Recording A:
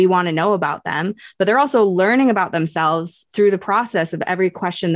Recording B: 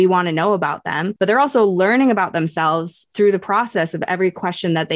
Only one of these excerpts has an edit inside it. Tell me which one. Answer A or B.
B